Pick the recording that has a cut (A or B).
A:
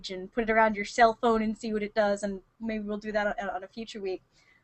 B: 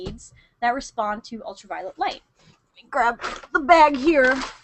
B